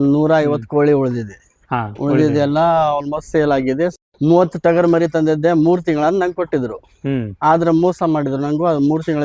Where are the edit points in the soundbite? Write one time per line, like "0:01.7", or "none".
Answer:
0:03.9